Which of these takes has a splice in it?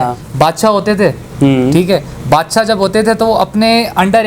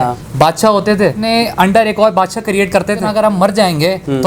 second; 2 cuts; at 1.0 s, 3.1 s

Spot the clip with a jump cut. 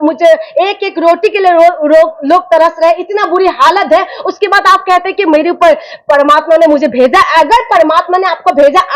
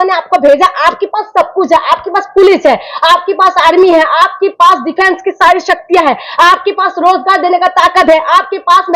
first; 1 cut; at 1.8 s

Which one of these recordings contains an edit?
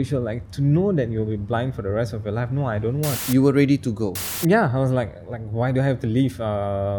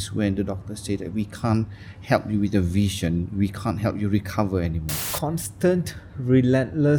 first; 2 cuts; at 3.1 s, 4.2 s

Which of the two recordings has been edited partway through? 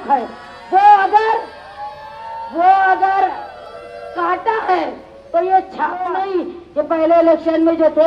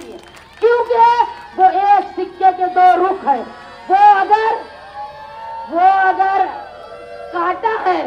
first; 1 cut; at 6.2 s

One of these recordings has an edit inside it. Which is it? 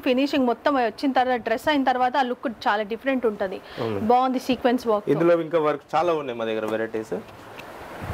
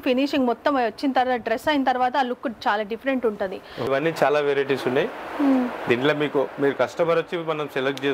second; 1 cut; at 3.9 s

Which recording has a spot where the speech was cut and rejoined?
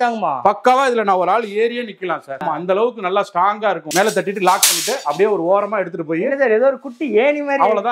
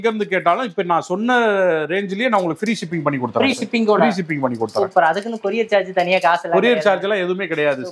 first; 2 cuts; at 2.4 s, 3.8 s

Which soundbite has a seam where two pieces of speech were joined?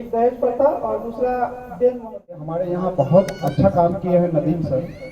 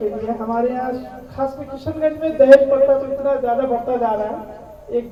first; 1 cut; at 2.5 s

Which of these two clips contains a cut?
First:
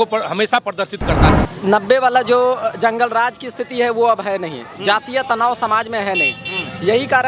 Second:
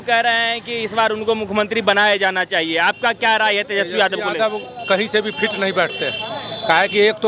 first; 1 cut; at 1.3 s

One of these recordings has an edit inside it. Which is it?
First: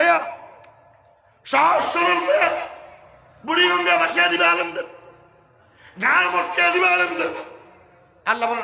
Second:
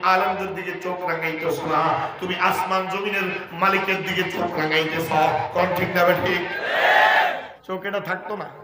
second; 1 cut; at 7.5 s

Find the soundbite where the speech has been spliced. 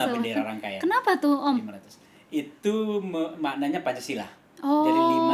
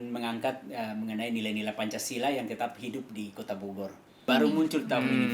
second; 1 cut; at 4.3 s

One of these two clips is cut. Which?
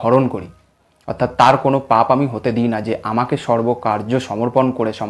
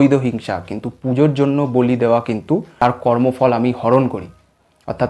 second; 1 cut; at 2.7 s

